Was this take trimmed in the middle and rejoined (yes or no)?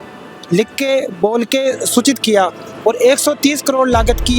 yes